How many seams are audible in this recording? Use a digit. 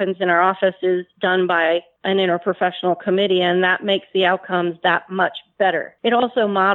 2